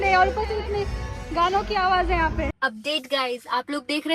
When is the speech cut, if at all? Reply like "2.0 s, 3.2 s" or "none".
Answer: 2.5 s

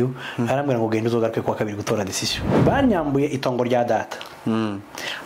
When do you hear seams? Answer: 2.4 s

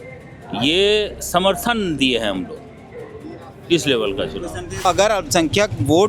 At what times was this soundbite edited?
4.8 s

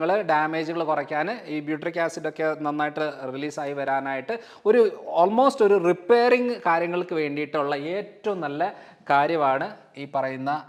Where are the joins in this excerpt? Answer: none

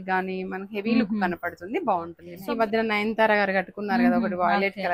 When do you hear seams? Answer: 2.2 s

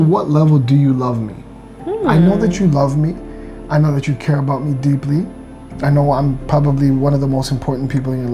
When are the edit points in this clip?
none

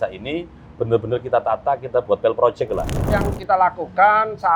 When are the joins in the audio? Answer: 3.1 s

